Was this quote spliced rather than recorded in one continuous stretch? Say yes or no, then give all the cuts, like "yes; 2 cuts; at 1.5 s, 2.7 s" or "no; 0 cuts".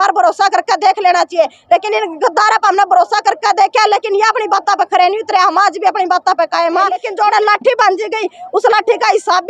yes; 1 cut; at 7.0 s